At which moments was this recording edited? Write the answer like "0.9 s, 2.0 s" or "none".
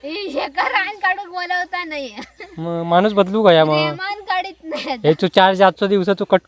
none